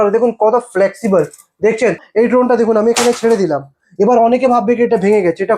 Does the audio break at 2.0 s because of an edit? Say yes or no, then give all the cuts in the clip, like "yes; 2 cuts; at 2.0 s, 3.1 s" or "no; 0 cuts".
yes; 1 cut; at 2.0 s